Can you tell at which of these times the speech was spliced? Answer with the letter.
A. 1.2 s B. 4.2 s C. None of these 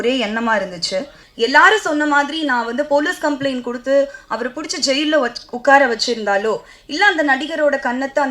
A